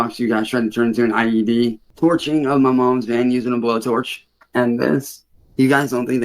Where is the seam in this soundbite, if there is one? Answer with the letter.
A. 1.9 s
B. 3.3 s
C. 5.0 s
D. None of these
A